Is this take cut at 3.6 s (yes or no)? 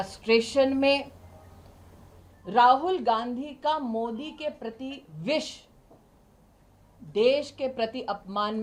no